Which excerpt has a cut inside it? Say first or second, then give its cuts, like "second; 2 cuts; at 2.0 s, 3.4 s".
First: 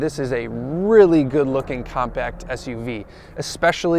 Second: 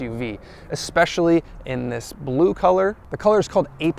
second; 1 cut; at 3.1 s